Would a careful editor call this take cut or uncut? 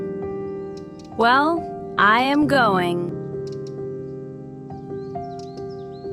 uncut